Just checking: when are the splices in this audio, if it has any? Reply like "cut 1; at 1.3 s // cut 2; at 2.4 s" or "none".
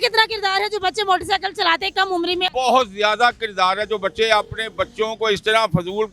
cut 1; at 2.5 s